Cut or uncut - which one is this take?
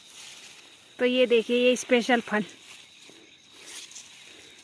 uncut